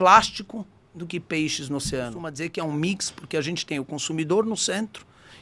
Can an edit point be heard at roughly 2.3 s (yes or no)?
yes